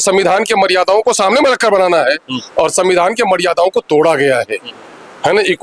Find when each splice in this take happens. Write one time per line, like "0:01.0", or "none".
none